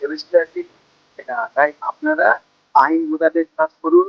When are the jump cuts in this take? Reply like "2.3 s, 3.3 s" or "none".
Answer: 1.4 s